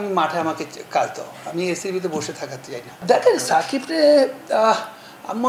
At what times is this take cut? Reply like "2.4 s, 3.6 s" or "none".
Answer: 2.9 s